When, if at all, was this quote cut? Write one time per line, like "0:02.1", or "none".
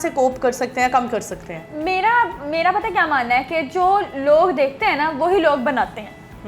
none